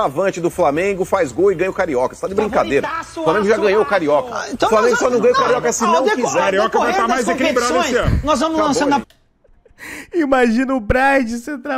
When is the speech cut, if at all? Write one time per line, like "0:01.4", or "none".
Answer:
none